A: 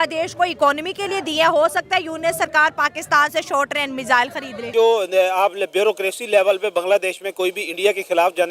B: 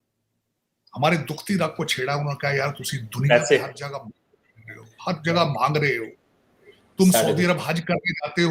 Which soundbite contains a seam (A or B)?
A